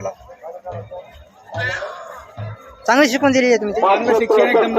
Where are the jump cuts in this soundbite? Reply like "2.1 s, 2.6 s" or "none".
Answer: 3.6 s